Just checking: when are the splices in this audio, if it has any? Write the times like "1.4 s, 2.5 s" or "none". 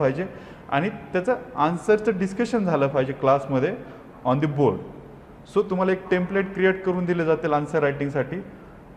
none